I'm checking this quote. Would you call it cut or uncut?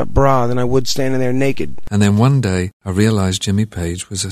cut